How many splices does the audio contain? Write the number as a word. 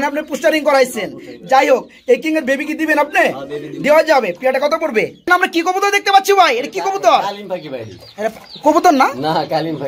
one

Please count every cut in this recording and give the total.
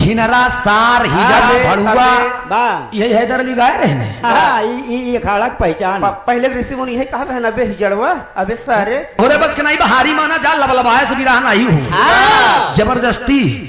one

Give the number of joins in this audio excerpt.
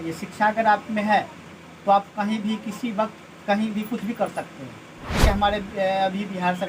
one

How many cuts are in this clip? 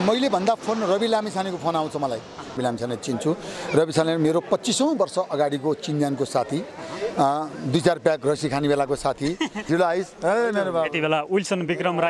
two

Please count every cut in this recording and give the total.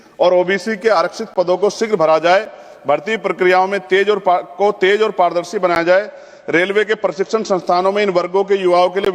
zero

